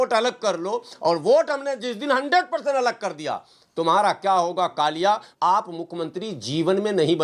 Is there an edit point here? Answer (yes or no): yes